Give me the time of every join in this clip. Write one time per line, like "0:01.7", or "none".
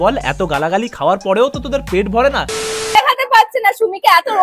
0:02.7